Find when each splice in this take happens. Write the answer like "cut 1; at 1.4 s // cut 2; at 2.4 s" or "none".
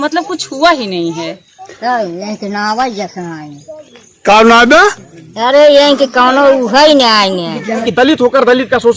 cut 1; at 7.9 s